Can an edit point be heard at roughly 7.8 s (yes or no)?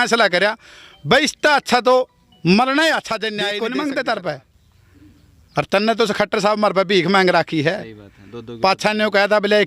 no